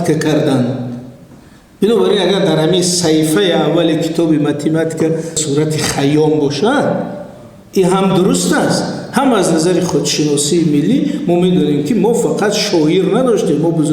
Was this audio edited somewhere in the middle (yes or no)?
yes